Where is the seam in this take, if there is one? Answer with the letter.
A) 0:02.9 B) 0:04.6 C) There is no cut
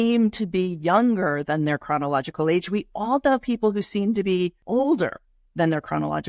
B